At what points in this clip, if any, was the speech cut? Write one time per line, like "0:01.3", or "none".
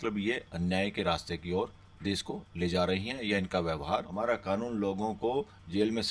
0:04.1